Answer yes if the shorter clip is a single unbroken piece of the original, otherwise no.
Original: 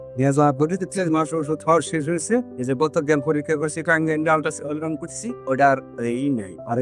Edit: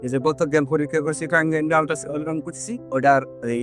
yes